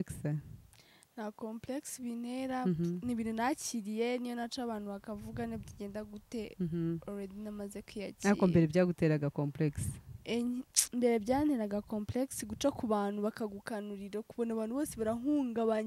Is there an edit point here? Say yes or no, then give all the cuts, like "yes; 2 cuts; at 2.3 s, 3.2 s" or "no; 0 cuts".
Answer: no; 0 cuts